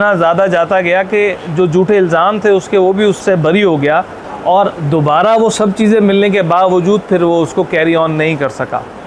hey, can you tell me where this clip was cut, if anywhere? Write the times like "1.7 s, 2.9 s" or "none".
3.2 s, 4.2 s

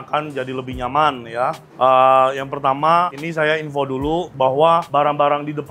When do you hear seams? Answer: none

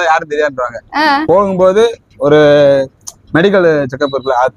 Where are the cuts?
1.2 s

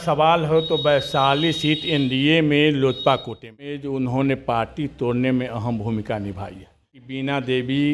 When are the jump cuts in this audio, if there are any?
3.9 s, 7.0 s

